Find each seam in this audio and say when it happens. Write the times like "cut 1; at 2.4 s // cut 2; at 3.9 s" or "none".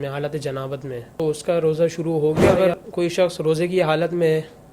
cut 1; at 1.1 s // cut 2; at 2.5 s